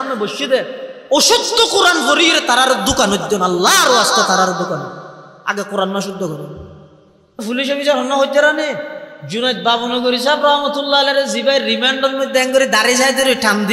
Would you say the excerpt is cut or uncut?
cut